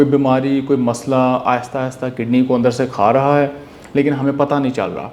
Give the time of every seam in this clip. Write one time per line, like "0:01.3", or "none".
none